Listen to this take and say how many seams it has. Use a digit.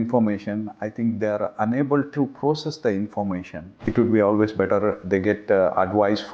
1